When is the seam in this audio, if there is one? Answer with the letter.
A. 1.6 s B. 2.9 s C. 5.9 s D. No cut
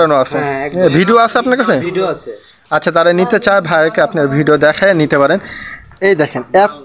D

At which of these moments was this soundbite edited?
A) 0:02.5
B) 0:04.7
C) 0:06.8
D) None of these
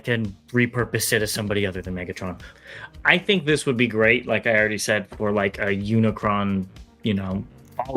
A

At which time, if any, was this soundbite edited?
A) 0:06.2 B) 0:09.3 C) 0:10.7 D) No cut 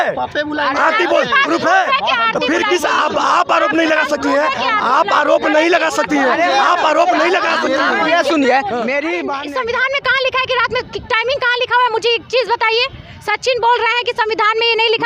B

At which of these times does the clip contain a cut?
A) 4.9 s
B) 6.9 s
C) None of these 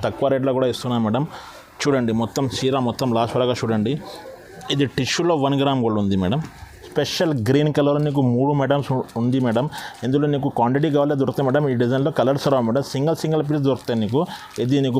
B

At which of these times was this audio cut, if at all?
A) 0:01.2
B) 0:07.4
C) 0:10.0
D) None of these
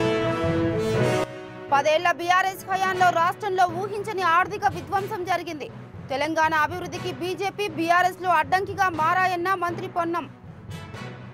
A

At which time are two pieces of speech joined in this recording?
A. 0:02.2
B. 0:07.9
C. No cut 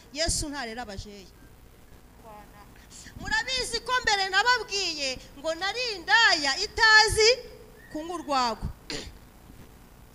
A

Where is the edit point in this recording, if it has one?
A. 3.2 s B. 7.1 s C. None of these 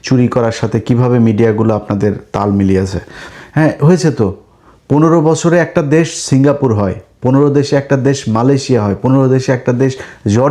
A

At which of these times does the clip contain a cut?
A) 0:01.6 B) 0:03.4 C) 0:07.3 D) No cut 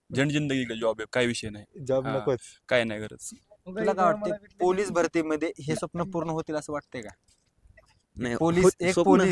B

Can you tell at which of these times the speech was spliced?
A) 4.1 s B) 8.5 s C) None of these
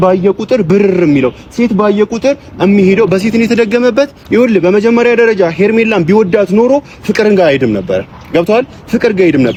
C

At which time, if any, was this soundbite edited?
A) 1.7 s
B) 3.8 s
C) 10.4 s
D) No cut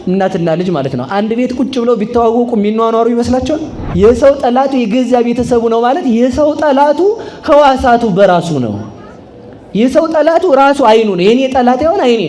B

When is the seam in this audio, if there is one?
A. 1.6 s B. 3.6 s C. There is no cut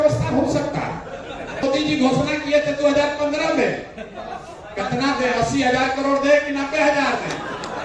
A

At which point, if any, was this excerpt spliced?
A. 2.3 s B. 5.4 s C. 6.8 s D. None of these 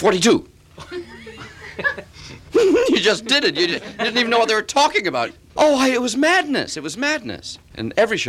B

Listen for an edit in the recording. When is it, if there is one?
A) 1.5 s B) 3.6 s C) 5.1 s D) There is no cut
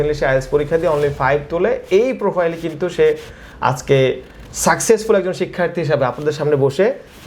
D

